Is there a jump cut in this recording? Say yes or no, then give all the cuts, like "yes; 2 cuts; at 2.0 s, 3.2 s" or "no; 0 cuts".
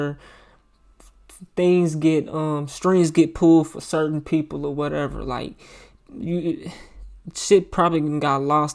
no; 0 cuts